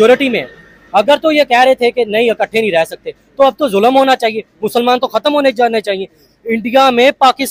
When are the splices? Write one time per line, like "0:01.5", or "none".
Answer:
none

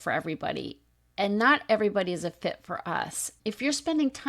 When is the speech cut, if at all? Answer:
0:03.3

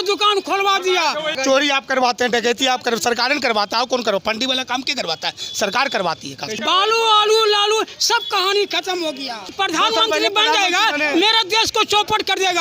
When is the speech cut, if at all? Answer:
0:01.4
0:06.5
0:09.5

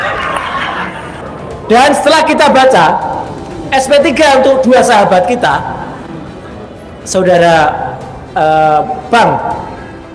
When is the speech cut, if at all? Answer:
0:01.1

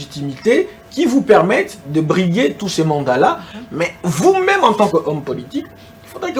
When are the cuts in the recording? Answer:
none

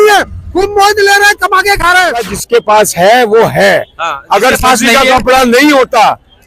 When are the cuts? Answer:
0:02.3

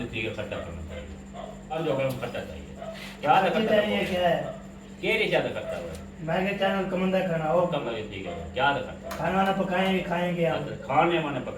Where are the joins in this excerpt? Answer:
0:01.7
0:07.8

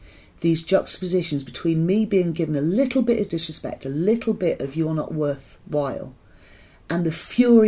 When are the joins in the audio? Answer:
0:03.3

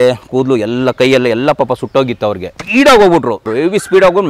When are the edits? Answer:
0:02.5
0:03.5

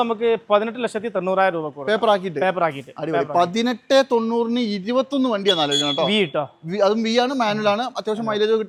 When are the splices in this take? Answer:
none

